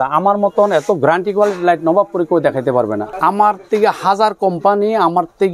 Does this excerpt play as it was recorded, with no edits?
no; 1 cut; at 3.1 s

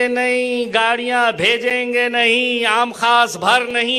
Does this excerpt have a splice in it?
no; 0 cuts

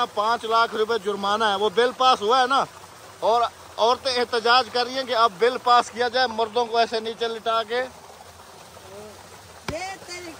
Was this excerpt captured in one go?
yes; 0 cuts

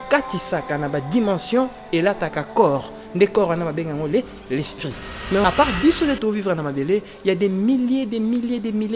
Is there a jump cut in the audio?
yes; 1 cut; at 5.4 s

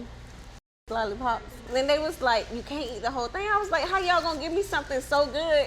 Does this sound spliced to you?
yes; 1 cut; at 1.6 s

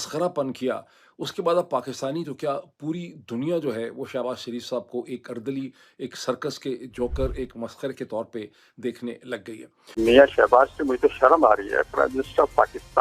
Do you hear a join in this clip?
yes; 1 cut; at 9.9 s

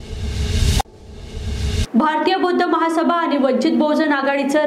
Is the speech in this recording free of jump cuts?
yes; 0 cuts

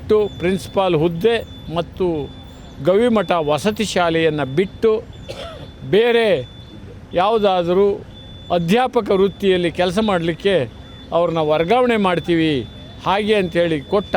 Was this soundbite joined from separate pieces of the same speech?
no; 0 cuts

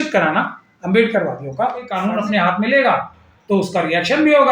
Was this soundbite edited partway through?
yes; 1 cut; at 2.0 s

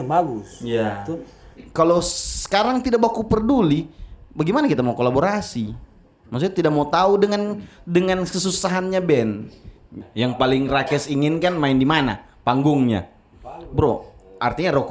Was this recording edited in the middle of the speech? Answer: yes; 2 cuts; at 1.7 s, 10.1 s

